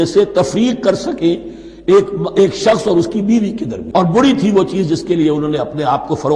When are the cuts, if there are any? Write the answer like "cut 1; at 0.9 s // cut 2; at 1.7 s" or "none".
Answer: cut 1; at 3.8 s

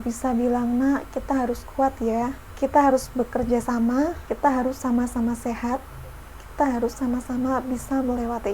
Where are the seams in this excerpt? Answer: cut 1; at 2.4 s // cut 2; at 4.2 s

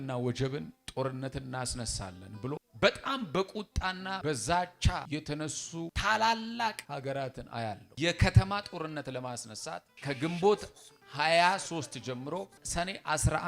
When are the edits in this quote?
cut 1; at 2.7 s // cut 2; at 4.2 s // cut 3; at 5.3 s // cut 4; at 6.8 s // cut 5; at 7.9 s // cut 6; at 9.9 s // cut 7; at 12.6 s

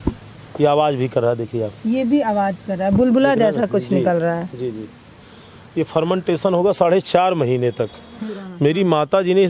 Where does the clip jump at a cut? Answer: cut 1; at 8.4 s

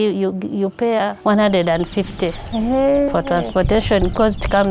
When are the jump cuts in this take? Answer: cut 1; at 1.2 s

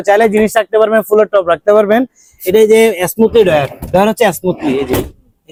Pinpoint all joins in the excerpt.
none

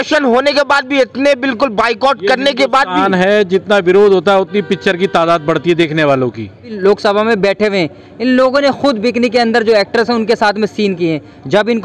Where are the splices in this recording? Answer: cut 1; at 6.7 s

